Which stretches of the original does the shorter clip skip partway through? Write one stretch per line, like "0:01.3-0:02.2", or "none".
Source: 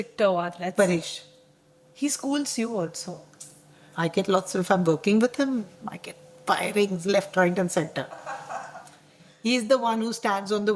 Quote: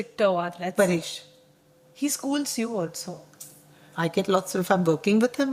none